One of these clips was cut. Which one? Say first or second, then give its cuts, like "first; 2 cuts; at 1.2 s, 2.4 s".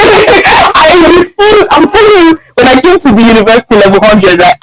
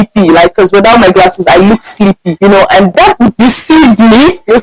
second; 2 cuts; at 2.3 s, 2.9 s